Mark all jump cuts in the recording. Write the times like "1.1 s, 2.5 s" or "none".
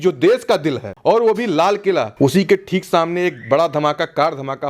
0.9 s, 2.1 s

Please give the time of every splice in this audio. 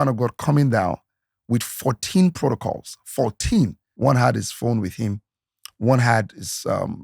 3.8 s

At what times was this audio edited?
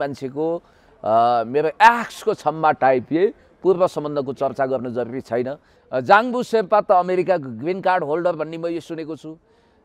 5.7 s

